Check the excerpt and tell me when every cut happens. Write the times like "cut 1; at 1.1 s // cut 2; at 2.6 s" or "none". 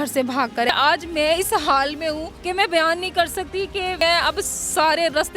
cut 1; at 0.7 s // cut 2; at 2.3 s // cut 3; at 4.0 s